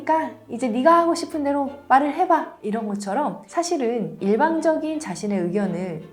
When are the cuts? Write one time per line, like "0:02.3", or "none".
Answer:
0:03.4